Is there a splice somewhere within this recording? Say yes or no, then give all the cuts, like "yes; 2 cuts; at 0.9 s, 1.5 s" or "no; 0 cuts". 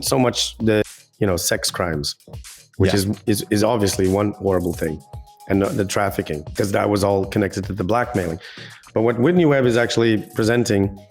yes; 2 cuts; at 0.8 s, 6.4 s